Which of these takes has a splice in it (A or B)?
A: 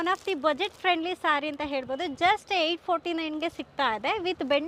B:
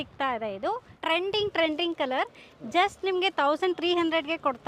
B